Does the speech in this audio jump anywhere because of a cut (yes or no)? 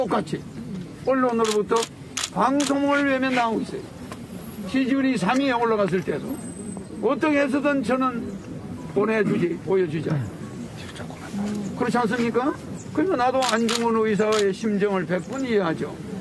no